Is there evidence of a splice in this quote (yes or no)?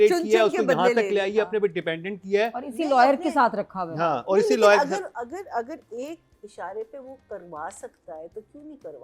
no